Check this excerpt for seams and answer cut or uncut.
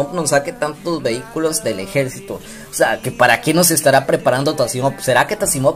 uncut